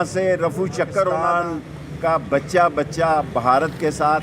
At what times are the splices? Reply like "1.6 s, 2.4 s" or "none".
1.2 s